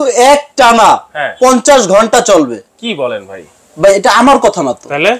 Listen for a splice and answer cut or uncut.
uncut